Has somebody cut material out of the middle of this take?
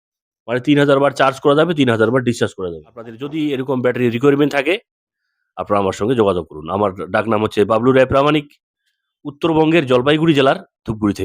yes; 1 cut; at 3.2 s

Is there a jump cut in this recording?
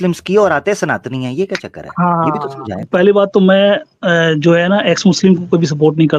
yes; 1 cut; at 2.8 s

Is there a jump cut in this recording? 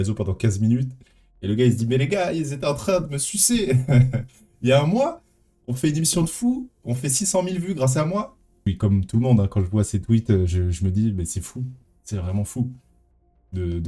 yes; 1 cut; at 8.6 s

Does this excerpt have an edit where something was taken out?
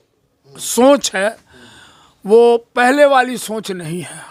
no; 0 cuts

